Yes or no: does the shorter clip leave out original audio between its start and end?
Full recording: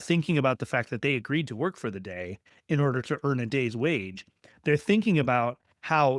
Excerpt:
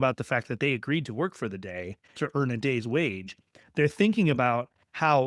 yes